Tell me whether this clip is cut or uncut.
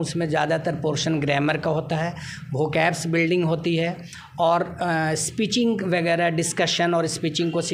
uncut